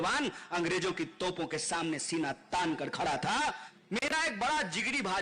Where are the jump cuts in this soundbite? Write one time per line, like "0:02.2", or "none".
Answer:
0:03.7